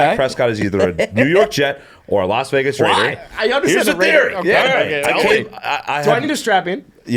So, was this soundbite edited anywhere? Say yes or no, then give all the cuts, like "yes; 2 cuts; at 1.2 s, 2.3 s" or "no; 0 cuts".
no; 0 cuts